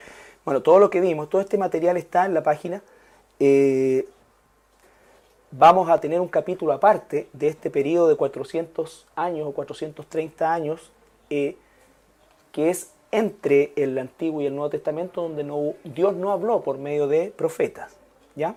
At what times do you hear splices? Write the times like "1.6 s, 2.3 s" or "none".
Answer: none

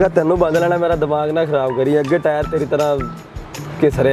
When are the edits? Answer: none

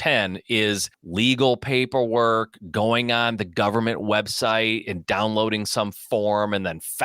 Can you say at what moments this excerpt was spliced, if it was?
1.0 s

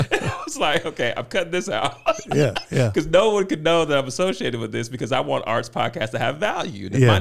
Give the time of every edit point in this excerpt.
none

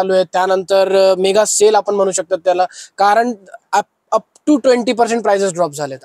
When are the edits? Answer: none

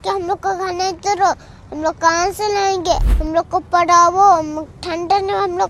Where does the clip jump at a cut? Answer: 3.1 s

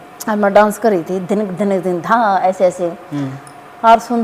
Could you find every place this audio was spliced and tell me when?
none

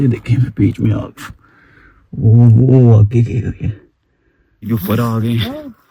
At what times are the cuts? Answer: 4.7 s

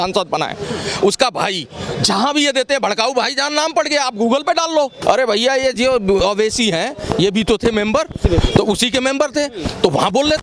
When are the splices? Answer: 5.0 s

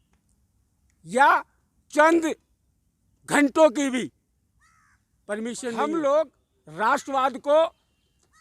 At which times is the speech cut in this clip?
5.8 s

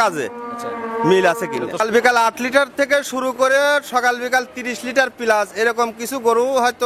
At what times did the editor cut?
1.8 s

